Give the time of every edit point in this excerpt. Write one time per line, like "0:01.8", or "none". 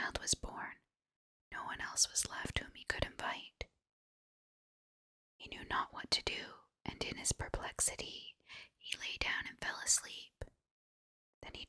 none